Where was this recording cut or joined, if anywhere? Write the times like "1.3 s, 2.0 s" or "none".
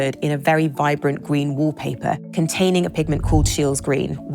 2.2 s